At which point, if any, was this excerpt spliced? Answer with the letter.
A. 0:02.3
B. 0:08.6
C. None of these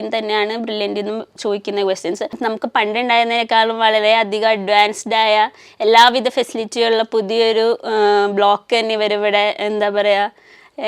A